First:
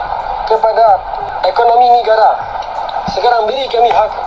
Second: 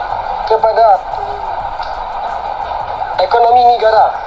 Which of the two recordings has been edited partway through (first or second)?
first